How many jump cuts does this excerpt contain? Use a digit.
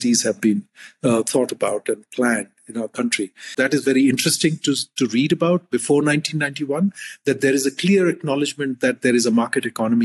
1